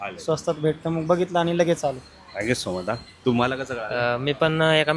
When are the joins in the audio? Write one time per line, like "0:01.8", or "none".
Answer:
none